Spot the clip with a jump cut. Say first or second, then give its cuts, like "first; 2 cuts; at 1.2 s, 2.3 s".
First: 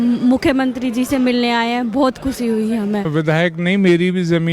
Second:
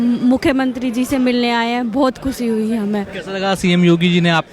first; 1 cut; at 3.1 s